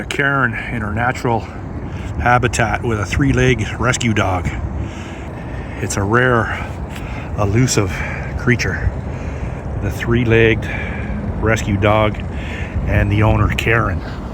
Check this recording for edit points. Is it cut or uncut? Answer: cut